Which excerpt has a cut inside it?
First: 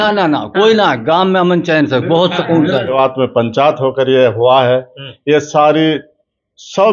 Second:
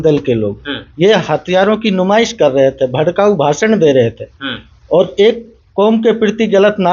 first; 1 cut; at 2.9 s

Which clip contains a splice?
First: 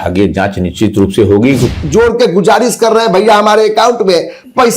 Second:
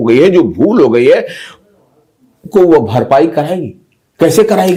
first; 1 cut; at 1.7 s

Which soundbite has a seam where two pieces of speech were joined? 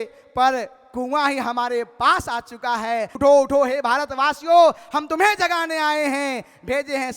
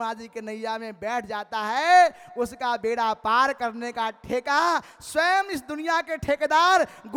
first; 1 cut; at 3.2 s

